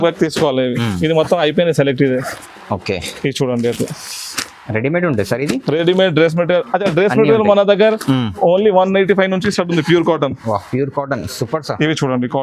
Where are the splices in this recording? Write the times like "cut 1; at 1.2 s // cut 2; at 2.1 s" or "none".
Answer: none